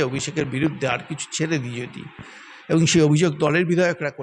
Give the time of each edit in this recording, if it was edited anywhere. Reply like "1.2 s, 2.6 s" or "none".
none